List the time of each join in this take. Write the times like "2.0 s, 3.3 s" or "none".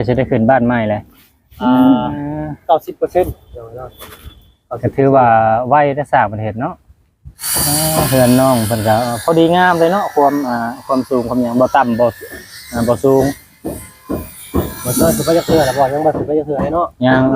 7.4 s

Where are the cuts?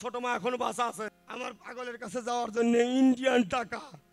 1.2 s

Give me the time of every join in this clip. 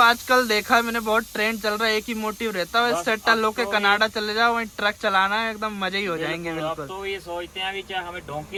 none

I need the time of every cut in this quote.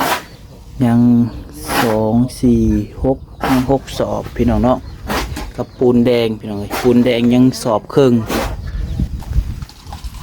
9.1 s

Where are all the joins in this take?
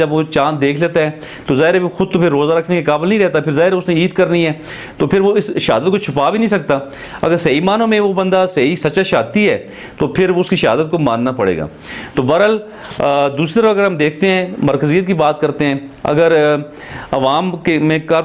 none

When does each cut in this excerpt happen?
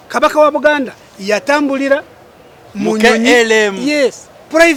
none

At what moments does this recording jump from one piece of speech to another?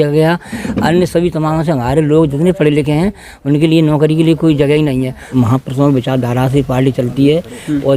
5.3 s

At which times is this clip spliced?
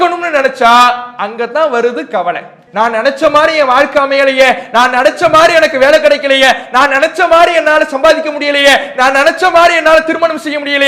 2.6 s

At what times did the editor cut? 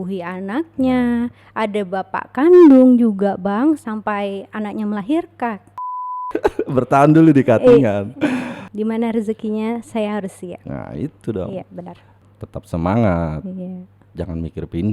6.2 s

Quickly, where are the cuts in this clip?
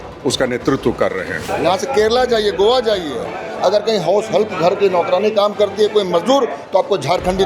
1.5 s

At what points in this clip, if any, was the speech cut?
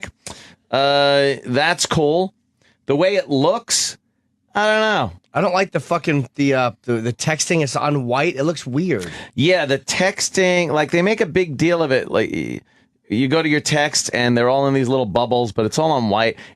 14.9 s

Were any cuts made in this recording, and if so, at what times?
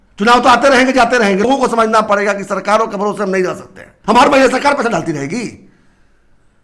1.5 s, 3.9 s

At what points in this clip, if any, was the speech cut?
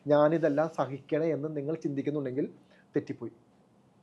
none

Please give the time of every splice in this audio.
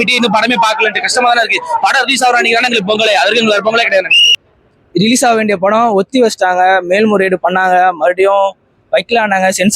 4.2 s

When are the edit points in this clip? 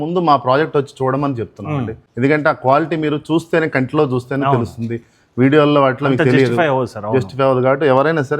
2.0 s

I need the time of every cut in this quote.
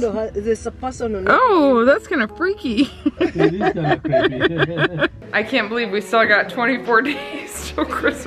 5.2 s

